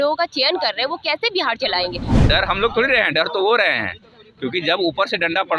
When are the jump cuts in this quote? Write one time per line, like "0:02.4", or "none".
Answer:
0:02.1